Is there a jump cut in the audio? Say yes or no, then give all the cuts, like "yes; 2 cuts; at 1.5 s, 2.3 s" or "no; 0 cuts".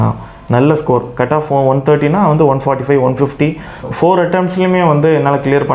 yes; 1 cut; at 3.7 s